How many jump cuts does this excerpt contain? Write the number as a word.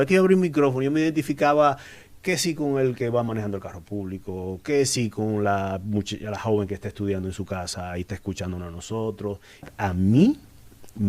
one